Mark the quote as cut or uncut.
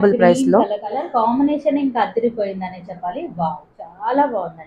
cut